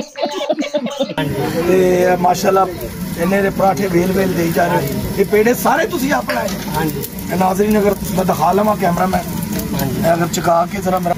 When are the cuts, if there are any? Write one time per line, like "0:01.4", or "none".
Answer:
0:01.2